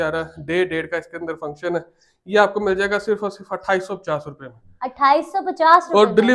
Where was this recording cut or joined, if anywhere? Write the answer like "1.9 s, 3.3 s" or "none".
none